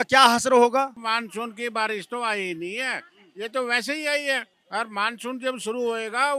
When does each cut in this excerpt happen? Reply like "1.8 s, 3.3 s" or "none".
0.9 s, 4.5 s